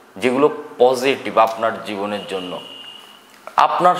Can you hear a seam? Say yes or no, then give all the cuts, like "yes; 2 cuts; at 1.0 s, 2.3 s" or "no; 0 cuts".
no; 0 cuts